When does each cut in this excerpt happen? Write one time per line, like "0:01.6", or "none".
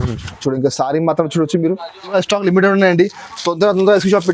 0:02.2